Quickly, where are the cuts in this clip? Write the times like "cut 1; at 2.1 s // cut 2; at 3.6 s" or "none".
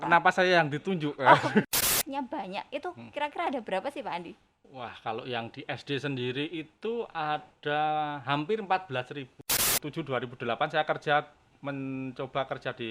cut 1; at 1.9 s // cut 2; at 9.6 s